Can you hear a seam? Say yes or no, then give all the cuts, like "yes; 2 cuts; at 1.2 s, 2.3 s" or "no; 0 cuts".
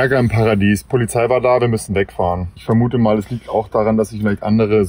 yes; 1 cut; at 2.5 s